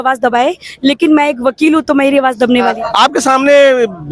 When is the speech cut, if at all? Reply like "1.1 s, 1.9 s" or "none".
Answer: 2.7 s